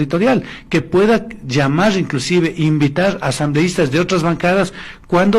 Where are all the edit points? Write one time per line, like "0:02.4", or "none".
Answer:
none